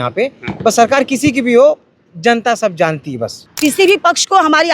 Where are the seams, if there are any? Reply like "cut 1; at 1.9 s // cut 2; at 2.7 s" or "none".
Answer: cut 1; at 3.4 s